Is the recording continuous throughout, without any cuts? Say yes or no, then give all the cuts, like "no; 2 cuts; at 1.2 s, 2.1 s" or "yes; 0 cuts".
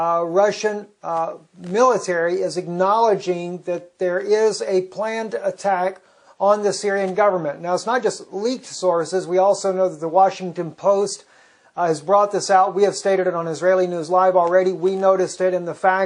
yes; 0 cuts